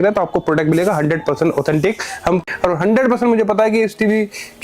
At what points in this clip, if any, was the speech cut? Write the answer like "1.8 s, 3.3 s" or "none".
2.3 s